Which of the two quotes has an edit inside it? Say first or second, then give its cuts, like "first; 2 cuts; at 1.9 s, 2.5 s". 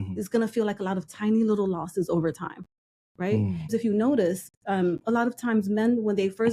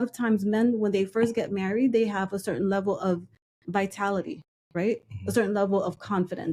first; 1 cut; at 3.7 s